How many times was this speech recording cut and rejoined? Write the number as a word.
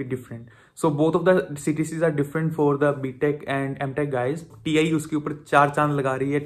one